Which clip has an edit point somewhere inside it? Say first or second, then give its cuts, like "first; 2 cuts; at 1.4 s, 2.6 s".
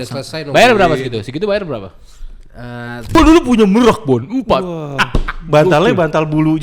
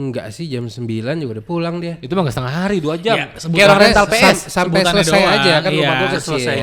first; 1 cut; at 3.1 s